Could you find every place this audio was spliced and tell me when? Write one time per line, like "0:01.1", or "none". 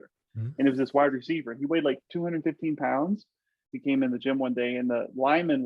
0:02.0
0:03.7